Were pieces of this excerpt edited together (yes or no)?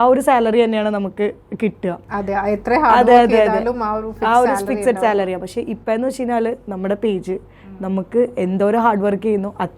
no